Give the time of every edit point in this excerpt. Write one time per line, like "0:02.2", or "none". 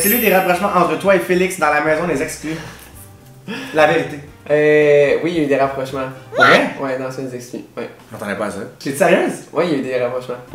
none